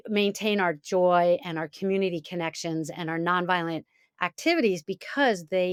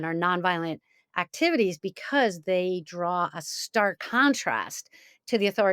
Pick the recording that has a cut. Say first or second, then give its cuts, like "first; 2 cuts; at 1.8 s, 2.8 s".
second; 1 cut; at 4.0 s